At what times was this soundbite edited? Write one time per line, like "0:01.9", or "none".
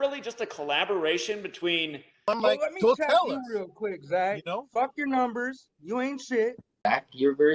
0:02.2
0:06.8